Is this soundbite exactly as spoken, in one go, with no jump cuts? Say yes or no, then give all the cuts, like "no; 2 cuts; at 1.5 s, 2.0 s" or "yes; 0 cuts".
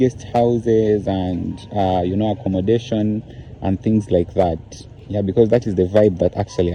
yes; 0 cuts